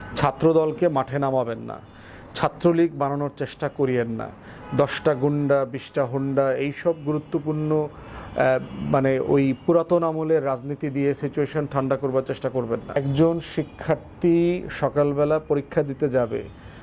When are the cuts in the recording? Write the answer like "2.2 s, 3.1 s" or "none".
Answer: 13.0 s